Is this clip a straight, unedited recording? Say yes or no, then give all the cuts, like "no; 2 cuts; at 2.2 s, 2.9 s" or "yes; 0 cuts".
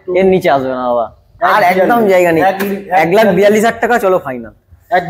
yes; 0 cuts